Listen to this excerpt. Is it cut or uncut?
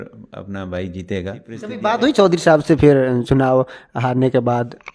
cut